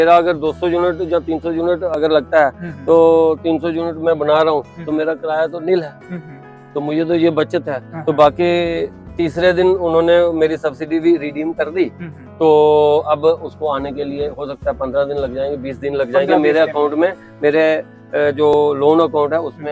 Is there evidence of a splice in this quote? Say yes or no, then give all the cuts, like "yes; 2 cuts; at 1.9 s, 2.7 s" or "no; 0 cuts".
no; 0 cuts